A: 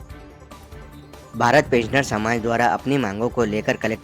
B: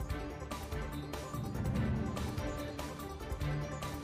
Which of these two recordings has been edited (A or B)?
A